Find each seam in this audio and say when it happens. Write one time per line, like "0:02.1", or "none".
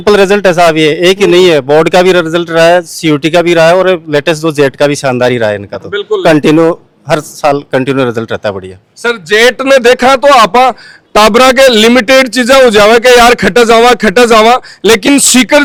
none